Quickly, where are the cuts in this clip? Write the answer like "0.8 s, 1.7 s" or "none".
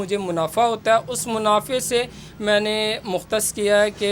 none